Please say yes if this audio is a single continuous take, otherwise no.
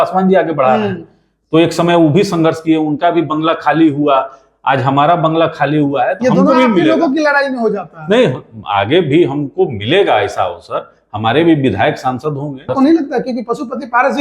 no